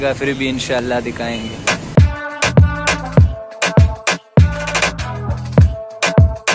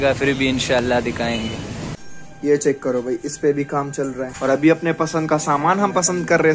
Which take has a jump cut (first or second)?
second